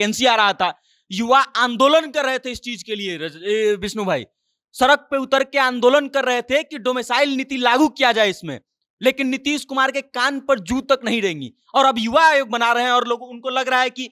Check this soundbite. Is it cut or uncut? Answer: uncut